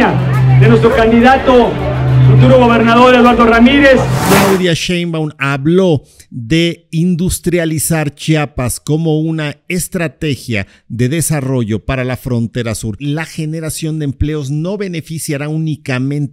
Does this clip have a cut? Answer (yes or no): yes